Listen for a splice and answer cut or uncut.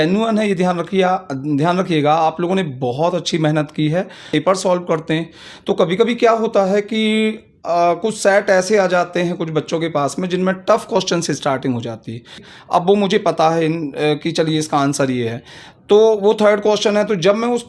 cut